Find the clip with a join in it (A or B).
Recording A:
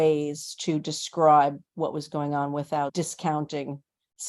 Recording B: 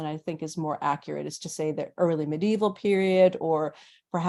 A